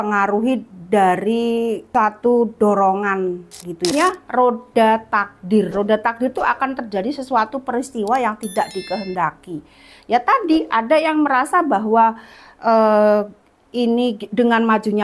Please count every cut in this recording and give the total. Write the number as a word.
two